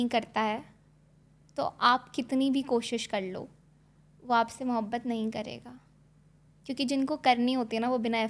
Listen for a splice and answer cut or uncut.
uncut